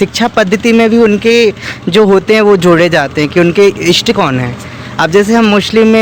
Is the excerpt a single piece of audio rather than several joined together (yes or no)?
yes